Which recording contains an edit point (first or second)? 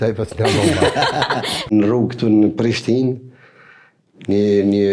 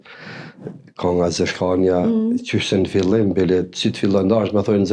first